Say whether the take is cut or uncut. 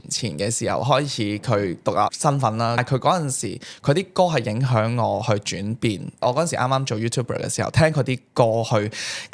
cut